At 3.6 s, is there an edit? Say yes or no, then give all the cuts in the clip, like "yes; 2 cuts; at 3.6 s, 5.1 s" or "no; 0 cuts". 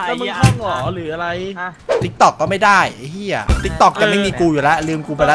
yes; 2 cuts; at 1.8 s, 3.6 s